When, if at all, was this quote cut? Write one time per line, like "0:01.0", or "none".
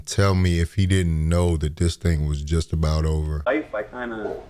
0:03.3